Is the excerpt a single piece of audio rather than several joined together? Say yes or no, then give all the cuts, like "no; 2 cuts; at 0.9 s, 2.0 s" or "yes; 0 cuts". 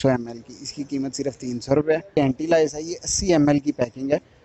no; 1 cut; at 2.2 s